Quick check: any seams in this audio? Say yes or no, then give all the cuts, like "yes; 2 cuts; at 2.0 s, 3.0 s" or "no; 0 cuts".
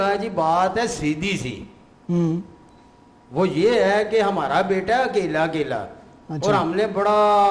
no; 0 cuts